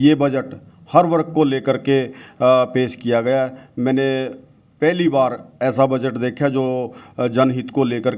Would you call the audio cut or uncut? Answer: uncut